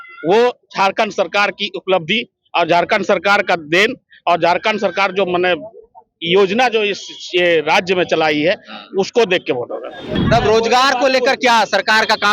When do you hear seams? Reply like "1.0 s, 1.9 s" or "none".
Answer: 10.1 s